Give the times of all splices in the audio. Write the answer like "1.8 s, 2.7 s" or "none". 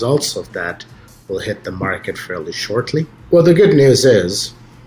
3.2 s